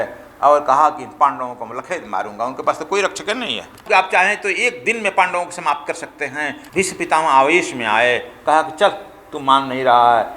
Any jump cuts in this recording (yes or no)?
yes